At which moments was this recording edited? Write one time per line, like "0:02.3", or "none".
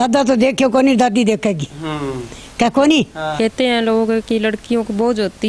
0:03.3

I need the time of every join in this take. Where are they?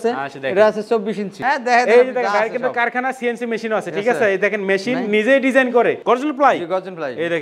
0:01.4
0:06.0

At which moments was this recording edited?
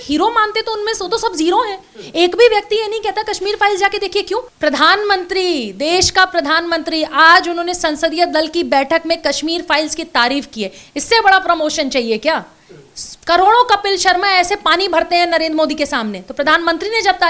0:04.5

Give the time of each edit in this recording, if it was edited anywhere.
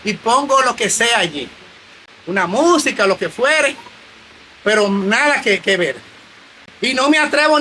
none

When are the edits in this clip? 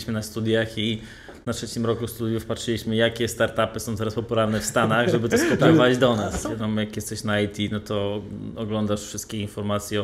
0:06.3

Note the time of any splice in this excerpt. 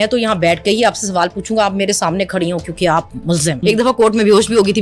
0:03.6

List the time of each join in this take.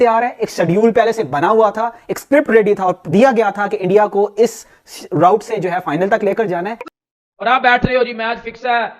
0:06.9

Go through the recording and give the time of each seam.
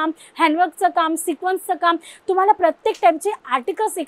none

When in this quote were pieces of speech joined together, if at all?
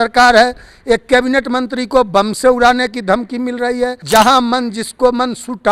0:04.0

